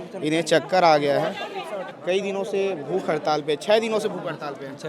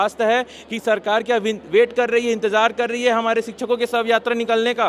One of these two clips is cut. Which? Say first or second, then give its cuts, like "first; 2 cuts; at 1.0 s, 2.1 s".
first; 1 cut; at 1.9 s